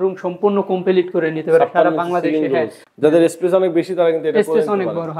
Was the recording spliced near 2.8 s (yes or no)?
yes